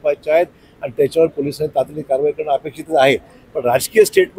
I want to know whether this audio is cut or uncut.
uncut